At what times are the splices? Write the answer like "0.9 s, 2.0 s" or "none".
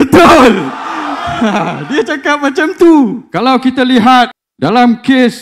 3.2 s, 4.4 s